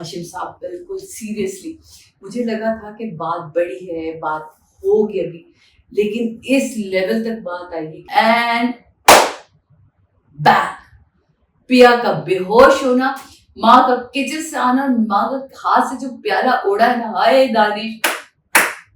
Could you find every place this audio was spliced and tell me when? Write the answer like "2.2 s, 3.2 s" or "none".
8.0 s